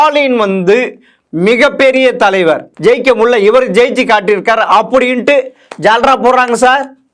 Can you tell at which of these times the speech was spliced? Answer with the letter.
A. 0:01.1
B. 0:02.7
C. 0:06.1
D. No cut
B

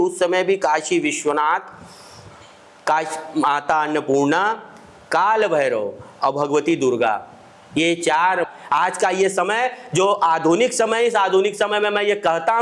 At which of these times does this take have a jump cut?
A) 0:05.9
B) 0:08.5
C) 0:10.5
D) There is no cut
B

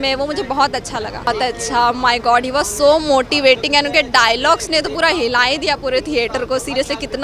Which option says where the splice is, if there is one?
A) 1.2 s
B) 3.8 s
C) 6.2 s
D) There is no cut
A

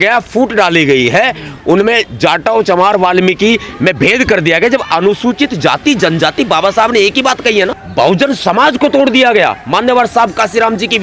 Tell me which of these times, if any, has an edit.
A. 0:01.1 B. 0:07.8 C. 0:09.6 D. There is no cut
B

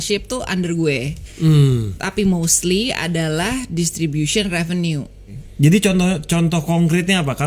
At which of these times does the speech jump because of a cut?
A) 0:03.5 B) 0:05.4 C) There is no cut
B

